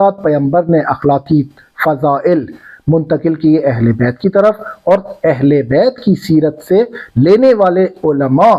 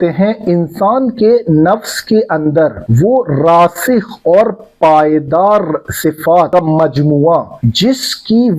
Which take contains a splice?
second; 3 cuts; at 2.8 s, 6.5 s, 7.6 s

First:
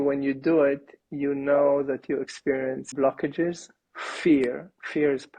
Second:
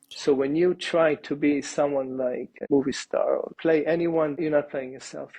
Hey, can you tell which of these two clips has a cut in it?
second; 3 cuts; at 2.5 s, 3.5 s, 4.4 s

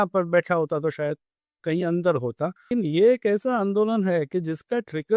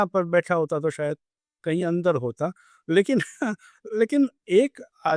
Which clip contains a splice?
first; 1 cut; at 2.6 s

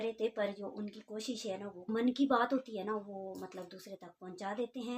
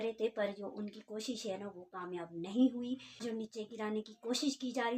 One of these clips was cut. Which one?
first; 1 cut; at 1.9 s

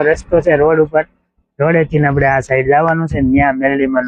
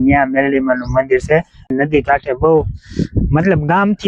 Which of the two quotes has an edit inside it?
second; 1 cut; at 1.7 s

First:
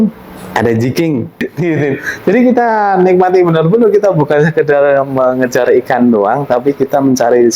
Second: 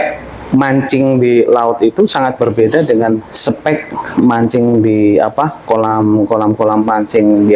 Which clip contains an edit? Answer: first; 1 cut; at 1.4 s

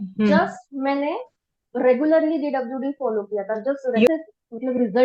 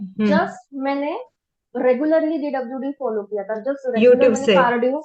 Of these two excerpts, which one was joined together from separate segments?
first; 1 cut; at 4.1 s

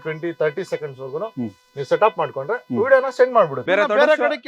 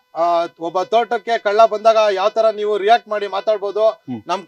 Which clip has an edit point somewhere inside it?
first; 1 cut; at 3.6 s

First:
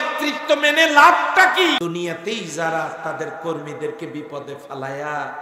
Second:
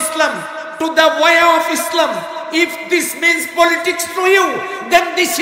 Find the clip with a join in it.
first; 1 cut; at 1.8 s

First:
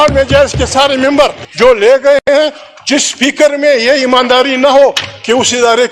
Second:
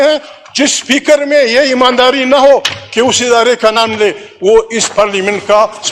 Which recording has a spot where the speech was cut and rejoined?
first; 1 cut; at 1.4 s

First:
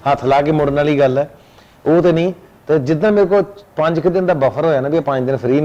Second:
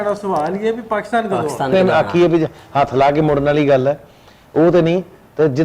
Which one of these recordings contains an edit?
second; 1 cut; at 1.7 s

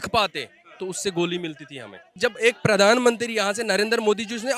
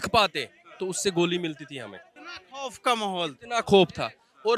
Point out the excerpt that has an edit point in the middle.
first; 1 cut; at 2.1 s

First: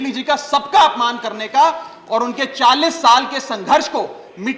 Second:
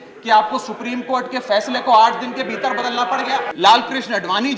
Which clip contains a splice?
second; 1 cut; at 3.5 s

